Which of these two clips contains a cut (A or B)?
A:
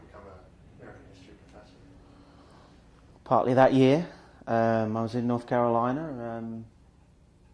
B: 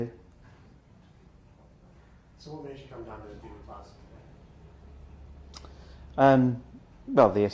A